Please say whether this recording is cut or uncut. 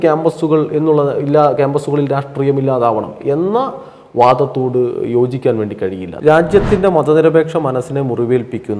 cut